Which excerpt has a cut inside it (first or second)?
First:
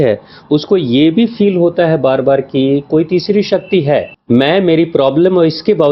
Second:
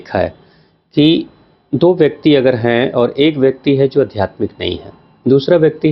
first